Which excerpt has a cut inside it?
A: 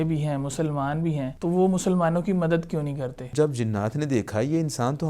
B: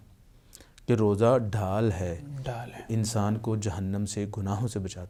A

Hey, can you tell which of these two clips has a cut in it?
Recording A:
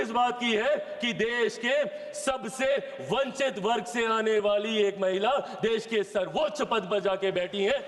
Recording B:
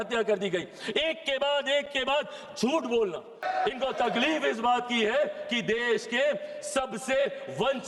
B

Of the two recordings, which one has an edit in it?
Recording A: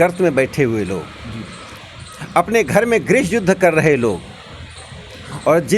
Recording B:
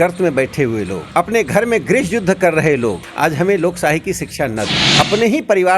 B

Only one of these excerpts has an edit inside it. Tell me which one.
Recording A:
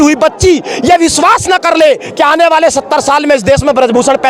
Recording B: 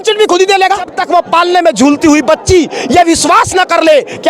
B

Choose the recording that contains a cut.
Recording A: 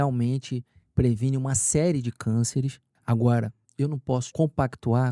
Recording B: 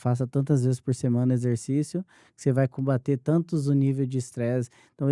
A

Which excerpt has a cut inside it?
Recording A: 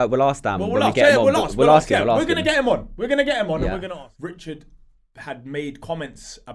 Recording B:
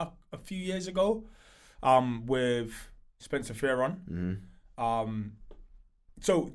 A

